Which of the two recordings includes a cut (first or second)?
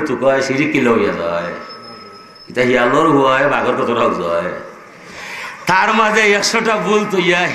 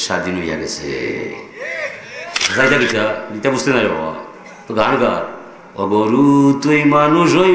second